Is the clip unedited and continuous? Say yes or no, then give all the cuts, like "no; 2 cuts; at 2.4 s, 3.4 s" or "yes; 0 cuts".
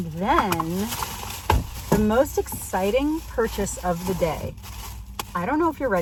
yes; 0 cuts